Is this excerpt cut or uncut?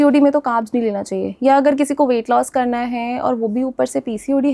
uncut